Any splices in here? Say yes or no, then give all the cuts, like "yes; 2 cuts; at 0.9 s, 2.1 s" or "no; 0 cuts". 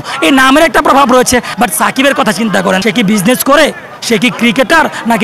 yes; 2 cuts; at 1.5 s, 2.8 s